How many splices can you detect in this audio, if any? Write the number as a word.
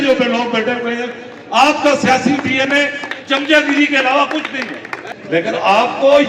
one